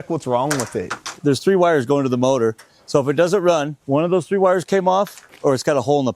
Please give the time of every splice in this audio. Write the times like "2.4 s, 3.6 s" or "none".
1.0 s, 3.8 s